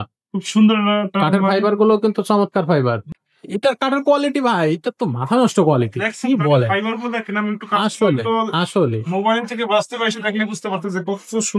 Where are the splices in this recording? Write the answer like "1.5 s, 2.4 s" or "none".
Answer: 3.0 s